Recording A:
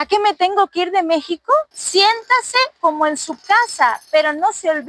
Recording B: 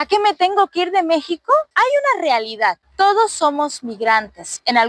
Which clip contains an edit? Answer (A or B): A